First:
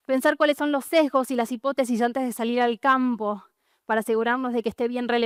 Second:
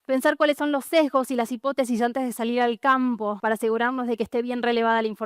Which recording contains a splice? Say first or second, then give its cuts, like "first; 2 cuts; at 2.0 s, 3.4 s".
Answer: second; 1 cut; at 3.4 s